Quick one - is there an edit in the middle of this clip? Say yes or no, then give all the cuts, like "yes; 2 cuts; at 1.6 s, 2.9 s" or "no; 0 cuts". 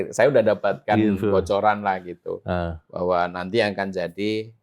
no; 0 cuts